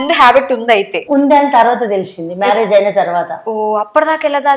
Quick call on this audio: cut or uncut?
cut